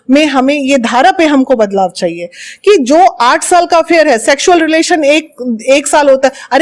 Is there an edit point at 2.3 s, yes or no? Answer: no